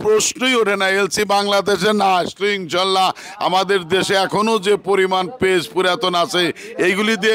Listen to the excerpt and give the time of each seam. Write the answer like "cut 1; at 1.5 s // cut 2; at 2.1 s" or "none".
none